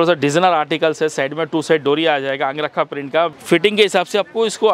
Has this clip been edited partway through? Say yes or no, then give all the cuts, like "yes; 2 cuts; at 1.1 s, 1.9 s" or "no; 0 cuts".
yes; 1 cut; at 3.4 s